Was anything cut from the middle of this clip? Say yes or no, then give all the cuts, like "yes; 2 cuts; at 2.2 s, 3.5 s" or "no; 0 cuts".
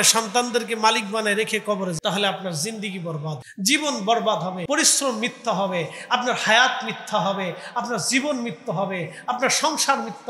yes; 3 cuts; at 2.0 s, 3.4 s, 4.6 s